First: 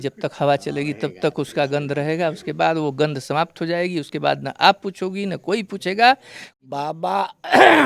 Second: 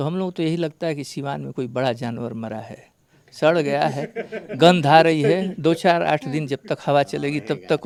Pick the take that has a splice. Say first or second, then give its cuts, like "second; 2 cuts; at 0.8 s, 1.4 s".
first; 1 cut; at 6.4 s